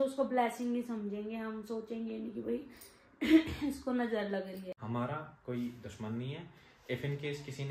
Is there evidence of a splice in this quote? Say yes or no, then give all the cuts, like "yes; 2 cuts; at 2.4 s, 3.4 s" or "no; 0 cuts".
yes; 1 cut; at 4.7 s